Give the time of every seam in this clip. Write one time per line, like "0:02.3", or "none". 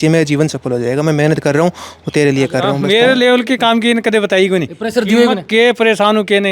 0:02.7